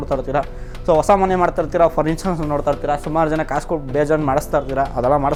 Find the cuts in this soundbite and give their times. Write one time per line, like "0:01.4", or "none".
none

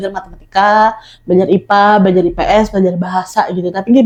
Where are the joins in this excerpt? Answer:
none

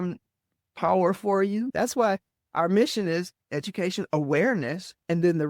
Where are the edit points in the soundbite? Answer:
0:01.7

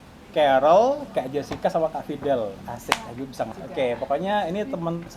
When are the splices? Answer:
0:03.5

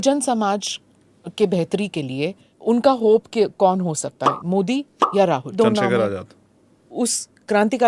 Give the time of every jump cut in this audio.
0:02.5
0:05.5
0:06.9

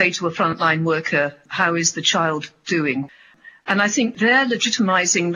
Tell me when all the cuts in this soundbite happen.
0:03.1

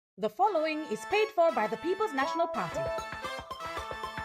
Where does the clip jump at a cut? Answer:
0:02.6

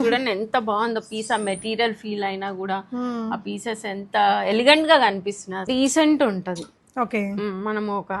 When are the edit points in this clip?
0:05.7

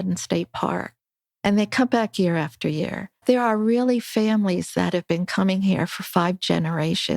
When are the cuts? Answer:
0:03.2

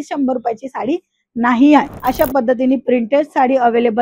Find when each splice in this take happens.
0:01.9

